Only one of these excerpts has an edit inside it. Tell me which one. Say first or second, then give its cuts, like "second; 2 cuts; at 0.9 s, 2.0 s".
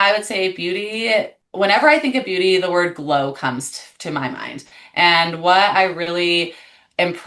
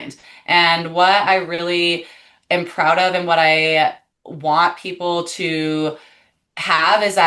first; 1 cut; at 1.4 s